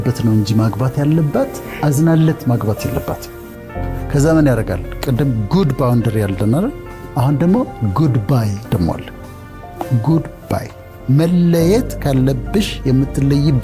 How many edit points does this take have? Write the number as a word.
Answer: one